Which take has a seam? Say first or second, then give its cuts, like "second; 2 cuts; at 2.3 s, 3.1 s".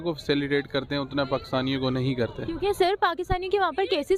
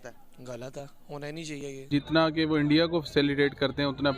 second; 1 cut; at 1.9 s